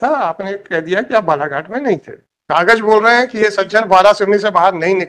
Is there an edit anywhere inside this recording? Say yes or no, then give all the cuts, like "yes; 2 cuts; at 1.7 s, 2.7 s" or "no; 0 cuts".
yes; 1 cut; at 2.2 s